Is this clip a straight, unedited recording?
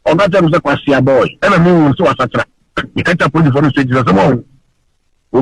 no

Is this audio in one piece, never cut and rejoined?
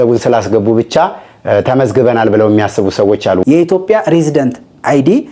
no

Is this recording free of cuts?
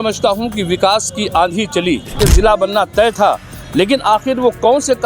no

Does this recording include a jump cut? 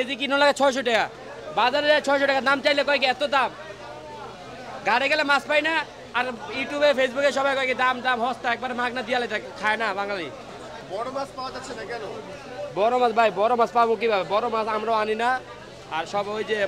no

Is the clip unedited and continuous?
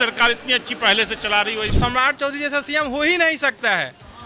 no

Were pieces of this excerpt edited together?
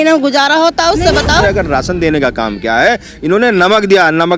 yes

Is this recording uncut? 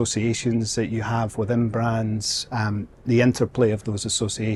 yes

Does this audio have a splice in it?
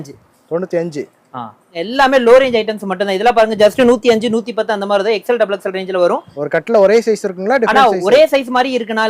yes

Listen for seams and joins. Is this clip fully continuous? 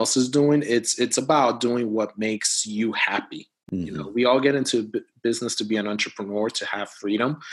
yes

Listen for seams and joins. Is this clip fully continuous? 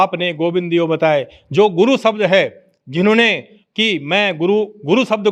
yes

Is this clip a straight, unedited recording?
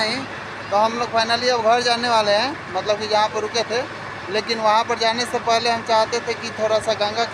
yes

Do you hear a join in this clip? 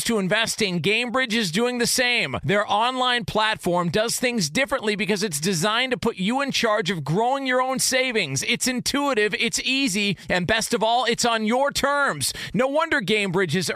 no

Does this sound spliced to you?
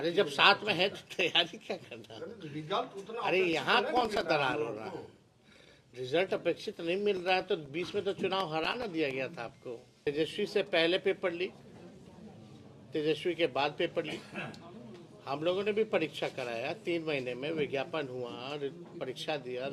yes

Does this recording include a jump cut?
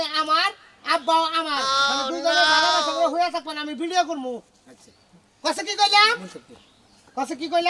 no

